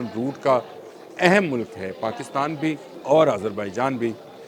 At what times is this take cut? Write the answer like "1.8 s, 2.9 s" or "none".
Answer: 2.9 s